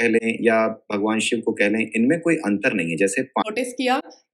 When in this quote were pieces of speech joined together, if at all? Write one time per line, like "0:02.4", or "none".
0:03.4